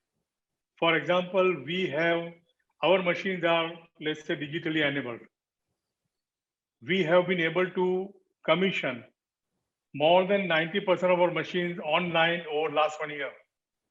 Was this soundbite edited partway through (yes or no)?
no